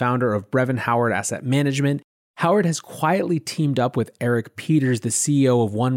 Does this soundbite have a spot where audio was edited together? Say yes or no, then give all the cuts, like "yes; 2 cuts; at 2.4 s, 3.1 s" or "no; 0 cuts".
yes; 1 cut; at 2.1 s